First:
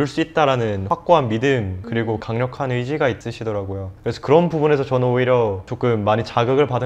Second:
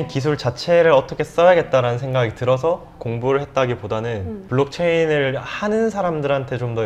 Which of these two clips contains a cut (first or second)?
first